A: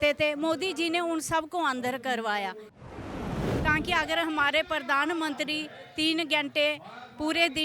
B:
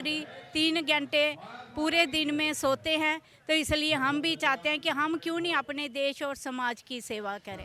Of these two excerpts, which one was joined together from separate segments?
A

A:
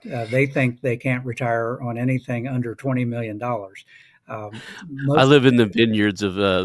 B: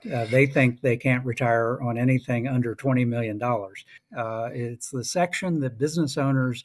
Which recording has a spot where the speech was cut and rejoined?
B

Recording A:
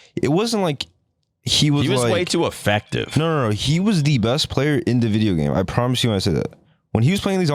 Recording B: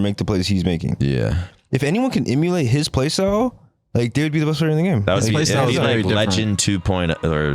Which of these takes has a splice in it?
B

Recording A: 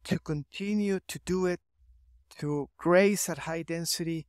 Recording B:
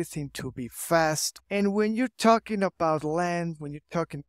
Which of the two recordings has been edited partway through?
B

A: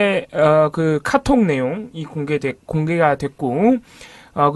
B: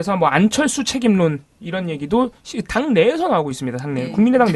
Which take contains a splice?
B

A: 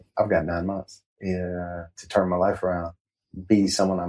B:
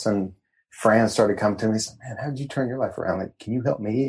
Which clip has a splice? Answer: A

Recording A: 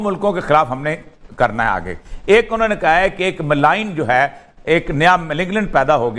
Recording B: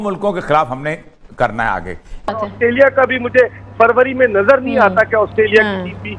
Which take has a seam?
B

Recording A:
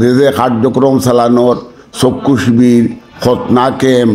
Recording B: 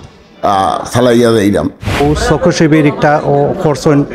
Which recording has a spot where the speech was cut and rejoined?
B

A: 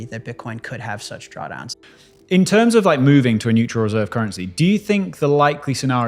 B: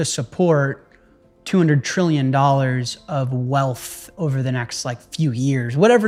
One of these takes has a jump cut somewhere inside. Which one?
A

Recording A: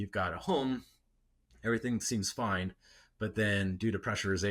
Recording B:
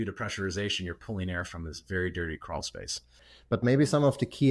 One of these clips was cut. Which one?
B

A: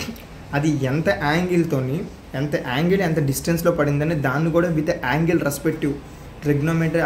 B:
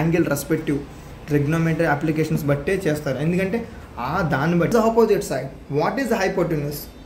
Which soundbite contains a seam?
B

